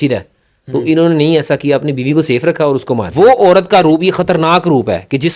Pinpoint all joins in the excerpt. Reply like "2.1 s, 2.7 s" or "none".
3.1 s